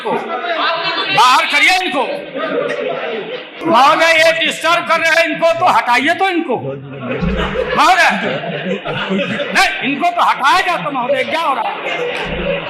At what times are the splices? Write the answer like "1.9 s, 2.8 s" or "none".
none

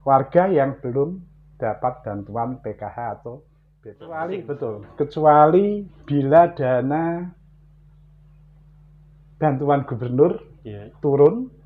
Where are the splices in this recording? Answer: 4.0 s

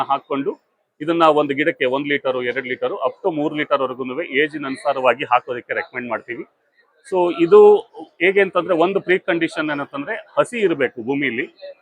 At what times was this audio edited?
none

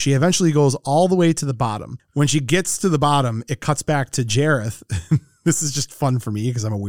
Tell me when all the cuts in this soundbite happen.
2.0 s

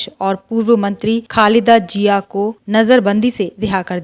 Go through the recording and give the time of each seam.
1.3 s, 2.6 s

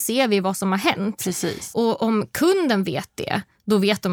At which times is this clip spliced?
1.7 s

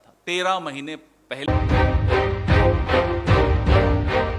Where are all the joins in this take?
1.4 s

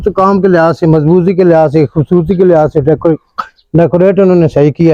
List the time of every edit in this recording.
none

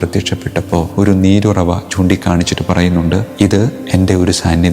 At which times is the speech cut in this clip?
0.9 s, 3.6 s

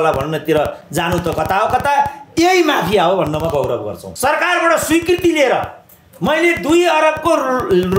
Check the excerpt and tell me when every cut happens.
4.0 s

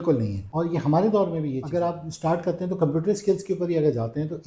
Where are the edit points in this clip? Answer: 1.6 s

